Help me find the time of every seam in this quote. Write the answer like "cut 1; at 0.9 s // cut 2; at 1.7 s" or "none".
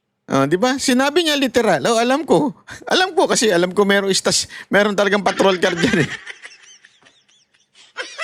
none